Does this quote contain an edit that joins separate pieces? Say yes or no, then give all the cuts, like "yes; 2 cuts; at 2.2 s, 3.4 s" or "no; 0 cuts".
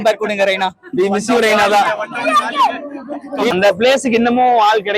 yes; 1 cut; at 3.5 s